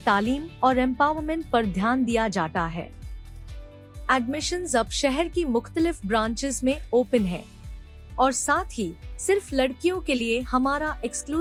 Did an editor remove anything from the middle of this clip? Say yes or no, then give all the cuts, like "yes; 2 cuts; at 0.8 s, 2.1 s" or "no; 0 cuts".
no; 0 cuts